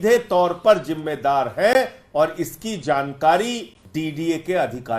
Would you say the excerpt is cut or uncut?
cut